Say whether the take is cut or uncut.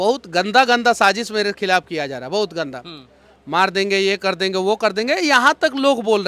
uncut